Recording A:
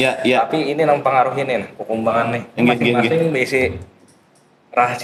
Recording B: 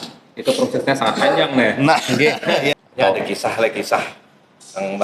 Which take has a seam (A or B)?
B